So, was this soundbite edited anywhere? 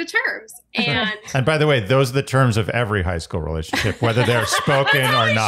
no; 0 cuts

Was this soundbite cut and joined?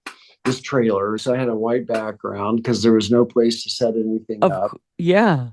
yes; 1 cut; at 1.2 s

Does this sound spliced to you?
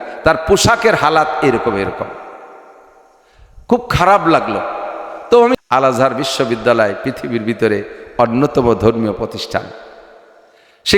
yes; 1 cut; at 5.6 s

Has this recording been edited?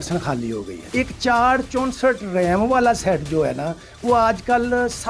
no; 0 cuts

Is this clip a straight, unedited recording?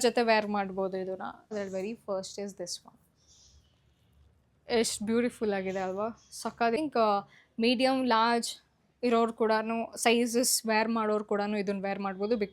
no; 2 cuts; at 1.5 s, 6.8 s

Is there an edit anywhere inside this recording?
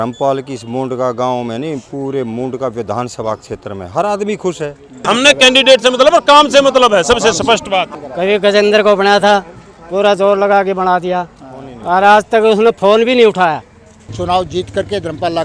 yes; 3 cuts; at 5.0 s, 8.0 s, 14.1 s

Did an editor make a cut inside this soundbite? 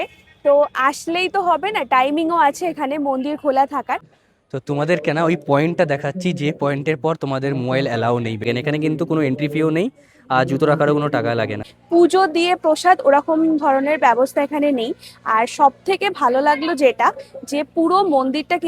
yes; 3 cuts; at 4.1 s, 8.5 s, 11.7 s

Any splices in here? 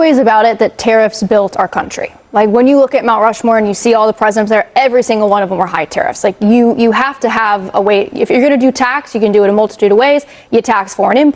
no; 0 cuts

